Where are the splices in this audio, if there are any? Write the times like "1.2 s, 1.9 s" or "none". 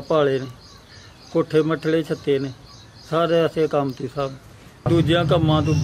4.9 s